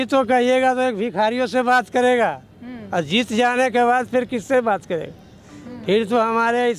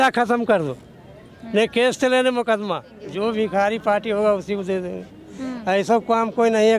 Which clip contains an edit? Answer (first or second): second